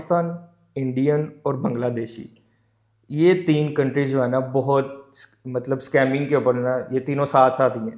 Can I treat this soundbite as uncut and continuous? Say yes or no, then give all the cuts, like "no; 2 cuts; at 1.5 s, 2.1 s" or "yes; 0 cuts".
yes; 0 cuts